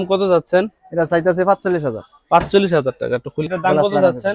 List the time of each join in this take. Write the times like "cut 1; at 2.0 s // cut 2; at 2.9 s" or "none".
cut 1; at 3.4 s